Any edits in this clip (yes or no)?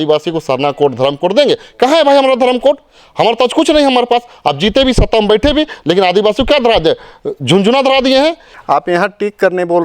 yes